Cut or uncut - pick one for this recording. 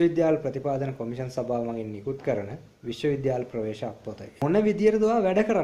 cut